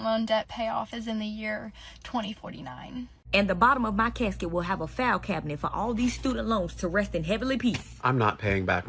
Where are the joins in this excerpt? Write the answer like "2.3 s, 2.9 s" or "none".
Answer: 3.3 s, 7.9 s